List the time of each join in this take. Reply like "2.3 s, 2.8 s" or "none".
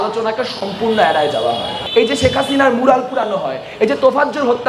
1.8 s

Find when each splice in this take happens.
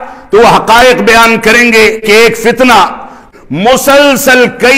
2.0 s, 3.2 s

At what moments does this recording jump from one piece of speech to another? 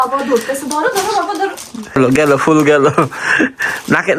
2.0 s

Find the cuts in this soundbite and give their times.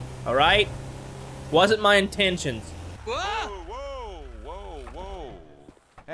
2.8 s

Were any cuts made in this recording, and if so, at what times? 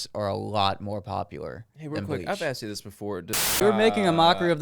3.6 s

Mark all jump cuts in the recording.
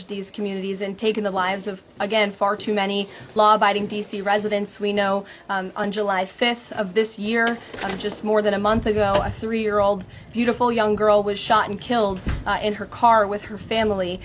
none

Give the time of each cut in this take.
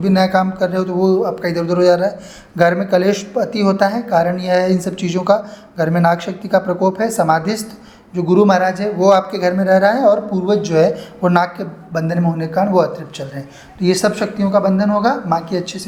none

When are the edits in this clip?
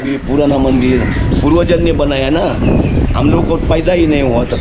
none

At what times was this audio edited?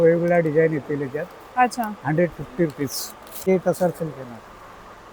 3.5 s

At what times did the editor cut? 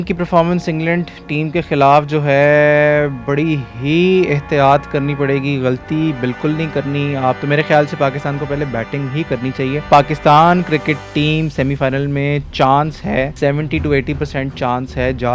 7.4 s, 9.9 s, 13.3 s

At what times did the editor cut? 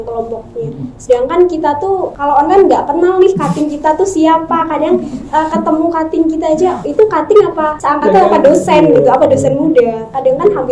2.1 s, 7.7 s

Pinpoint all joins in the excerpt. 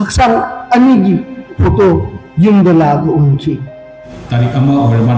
4.0 s

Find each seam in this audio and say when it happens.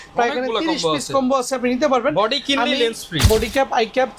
3.3 s

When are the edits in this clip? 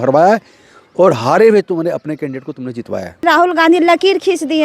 3.2 s

